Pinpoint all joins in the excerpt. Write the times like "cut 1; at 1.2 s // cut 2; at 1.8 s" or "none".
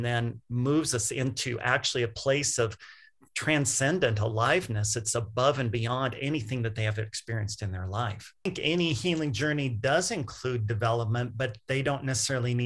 cut 1; at 8.5 s